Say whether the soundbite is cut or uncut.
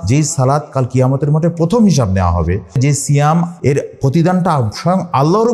cut